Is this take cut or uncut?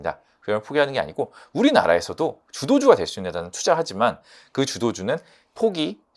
uncut